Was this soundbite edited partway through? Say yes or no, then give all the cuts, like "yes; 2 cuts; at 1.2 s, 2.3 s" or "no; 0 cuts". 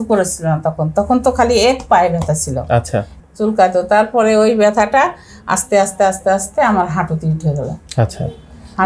yes; 1 cut; at 3.1 s